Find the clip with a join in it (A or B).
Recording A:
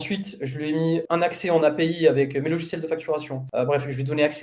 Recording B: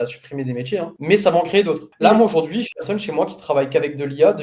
A